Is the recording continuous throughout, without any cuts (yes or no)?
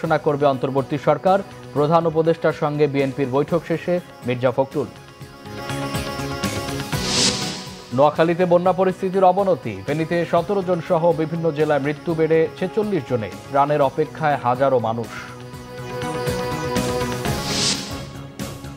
no